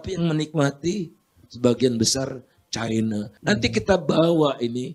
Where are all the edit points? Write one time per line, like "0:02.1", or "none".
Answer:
0:03.3